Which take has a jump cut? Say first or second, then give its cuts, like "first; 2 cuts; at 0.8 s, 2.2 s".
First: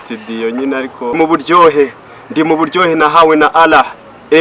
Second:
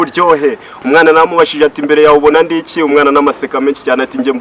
first; 1 cut; at 1.1 s